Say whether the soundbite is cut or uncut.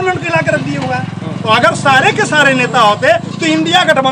uncut